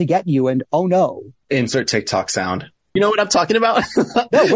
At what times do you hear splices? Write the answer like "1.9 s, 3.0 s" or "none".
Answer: 1.3 s, 2.9 s